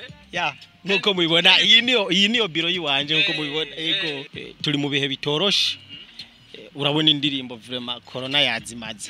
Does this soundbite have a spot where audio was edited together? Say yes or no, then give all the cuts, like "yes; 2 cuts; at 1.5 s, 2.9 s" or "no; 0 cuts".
yes; 1 cut; at 4.3 s